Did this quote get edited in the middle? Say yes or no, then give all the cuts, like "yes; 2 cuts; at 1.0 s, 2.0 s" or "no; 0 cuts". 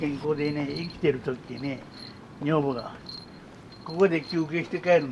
no; 0 cuts